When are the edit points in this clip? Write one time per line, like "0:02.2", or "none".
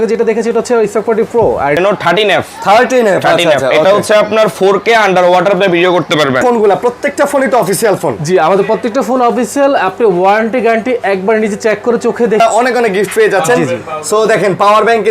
0:01.8
0:06.4
0:12.4